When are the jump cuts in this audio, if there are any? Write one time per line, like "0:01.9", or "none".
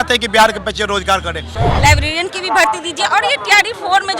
0:01.5

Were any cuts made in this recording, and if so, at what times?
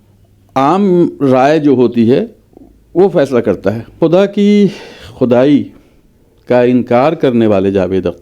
0:03.9

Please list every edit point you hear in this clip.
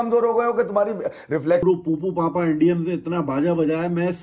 0:01.7

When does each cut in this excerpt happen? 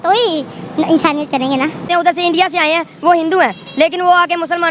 0:01.9

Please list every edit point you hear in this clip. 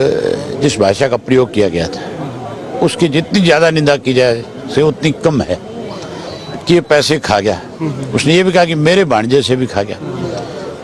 0:06.2

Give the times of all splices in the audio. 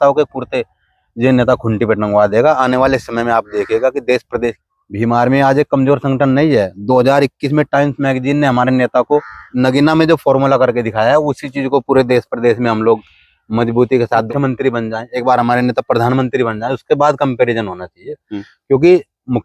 0:04.6
0:09.5
0:14.3

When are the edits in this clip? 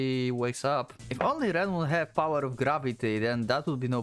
0:01.0

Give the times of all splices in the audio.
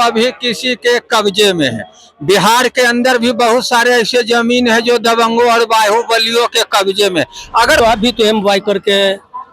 0:07.8

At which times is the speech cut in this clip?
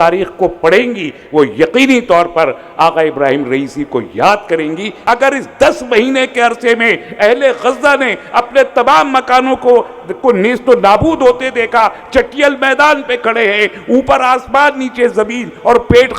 0:05.0

